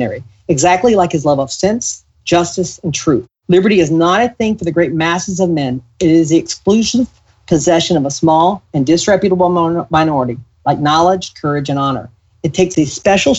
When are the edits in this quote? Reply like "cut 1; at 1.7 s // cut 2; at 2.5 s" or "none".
none